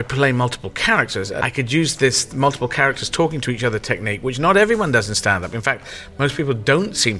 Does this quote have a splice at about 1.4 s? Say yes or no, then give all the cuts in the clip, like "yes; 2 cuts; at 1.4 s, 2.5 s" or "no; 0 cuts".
yes; 1 cut; at 1.4 s